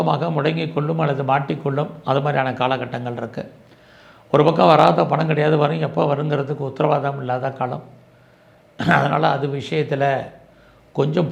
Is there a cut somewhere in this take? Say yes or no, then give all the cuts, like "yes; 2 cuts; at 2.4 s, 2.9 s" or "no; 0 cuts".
no; 0 cuts